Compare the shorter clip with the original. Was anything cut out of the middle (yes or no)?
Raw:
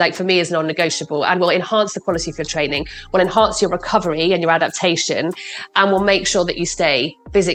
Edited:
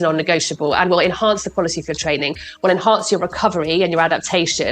no